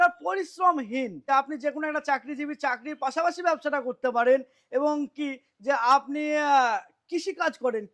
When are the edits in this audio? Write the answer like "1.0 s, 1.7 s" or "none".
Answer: 1.2 s